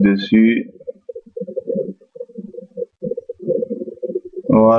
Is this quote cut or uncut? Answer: uncut